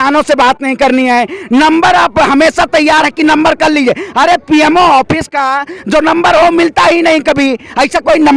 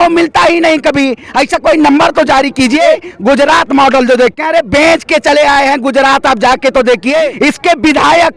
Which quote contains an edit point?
second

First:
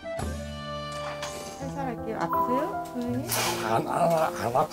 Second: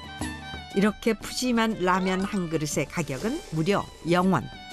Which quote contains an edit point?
first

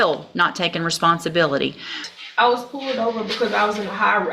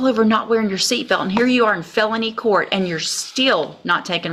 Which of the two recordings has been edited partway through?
first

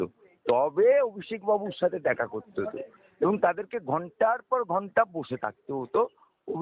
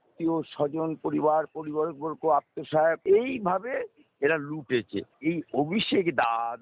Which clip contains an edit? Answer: second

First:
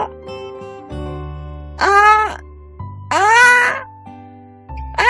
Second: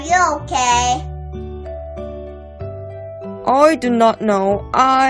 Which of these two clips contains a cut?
second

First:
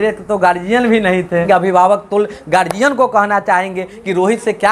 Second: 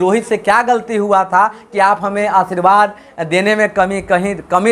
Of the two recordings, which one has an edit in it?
first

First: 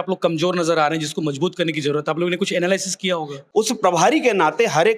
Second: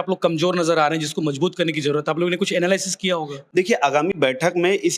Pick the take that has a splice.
first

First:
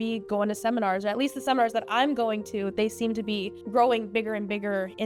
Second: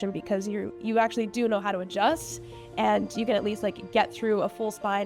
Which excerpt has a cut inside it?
first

